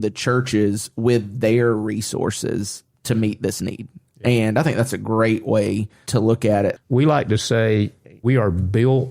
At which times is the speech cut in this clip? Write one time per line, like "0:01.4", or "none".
0:06.0
0:06.8
0:08.2